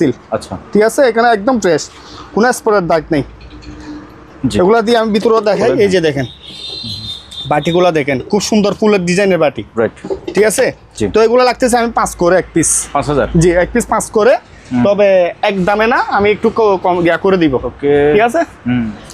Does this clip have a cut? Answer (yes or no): no